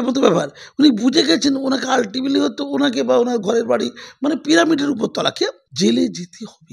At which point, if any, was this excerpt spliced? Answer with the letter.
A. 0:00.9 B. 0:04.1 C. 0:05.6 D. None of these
C